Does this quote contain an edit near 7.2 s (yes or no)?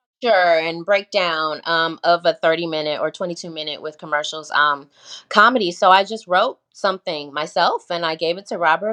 no